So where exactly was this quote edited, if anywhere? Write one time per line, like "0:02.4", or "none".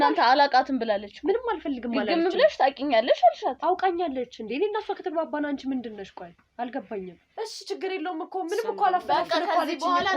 0:07.2